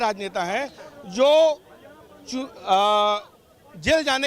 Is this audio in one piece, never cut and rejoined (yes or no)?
yes